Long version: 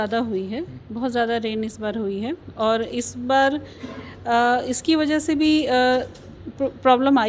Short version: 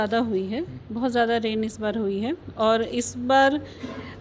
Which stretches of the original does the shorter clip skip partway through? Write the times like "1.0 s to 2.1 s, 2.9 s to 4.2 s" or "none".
none